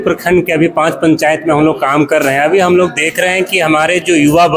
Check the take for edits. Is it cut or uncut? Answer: uncut